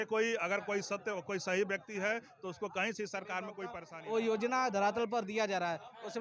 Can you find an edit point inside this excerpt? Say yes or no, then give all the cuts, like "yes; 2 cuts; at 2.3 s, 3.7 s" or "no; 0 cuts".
yes; 1 cut; at 3.7 s